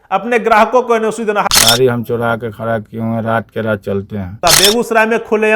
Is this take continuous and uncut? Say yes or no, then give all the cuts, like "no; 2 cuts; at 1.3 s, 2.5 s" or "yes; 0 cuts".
no; 2 cuts; at 1.5 s, 4.4 s